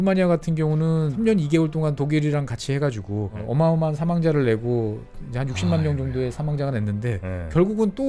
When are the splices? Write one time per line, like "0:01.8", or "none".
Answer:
0:01.1
0:03.4